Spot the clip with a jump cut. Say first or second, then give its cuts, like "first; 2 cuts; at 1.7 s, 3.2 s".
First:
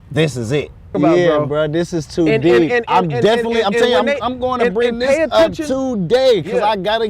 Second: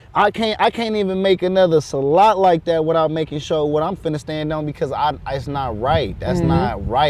first; 1 cut; at 0.9 s